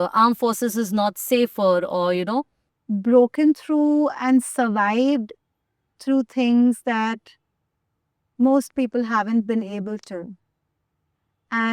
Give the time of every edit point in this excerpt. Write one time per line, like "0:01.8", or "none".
0:02.6